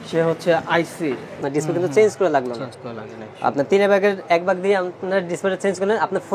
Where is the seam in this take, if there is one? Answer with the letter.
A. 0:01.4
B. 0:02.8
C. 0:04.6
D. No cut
A